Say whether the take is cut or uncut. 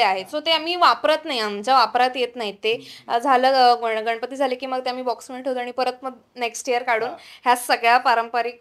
uncut